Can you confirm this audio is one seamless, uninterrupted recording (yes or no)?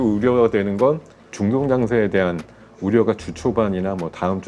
no